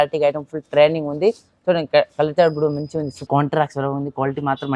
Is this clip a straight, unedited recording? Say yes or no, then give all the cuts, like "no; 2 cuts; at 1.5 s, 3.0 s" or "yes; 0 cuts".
no; 1 cut; at 3.2 s